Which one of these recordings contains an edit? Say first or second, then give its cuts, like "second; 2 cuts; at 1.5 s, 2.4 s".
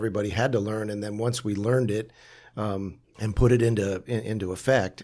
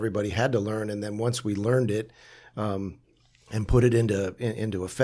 first; 1 cut; at 3.0 s